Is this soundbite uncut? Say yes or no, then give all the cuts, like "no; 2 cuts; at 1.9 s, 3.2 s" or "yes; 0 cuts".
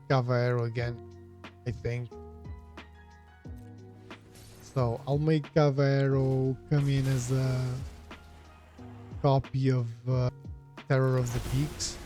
no; 1 cut; at 10.3 s